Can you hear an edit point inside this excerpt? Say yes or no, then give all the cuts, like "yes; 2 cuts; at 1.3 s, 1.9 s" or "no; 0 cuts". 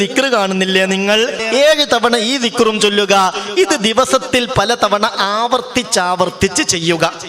yes; 1 cut; at 1.4 s